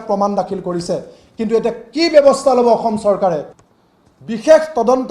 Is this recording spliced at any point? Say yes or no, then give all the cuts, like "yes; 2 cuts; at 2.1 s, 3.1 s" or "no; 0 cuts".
yes; 1 cut; at 3.5 s